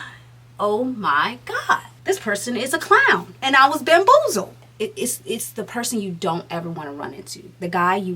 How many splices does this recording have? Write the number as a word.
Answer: three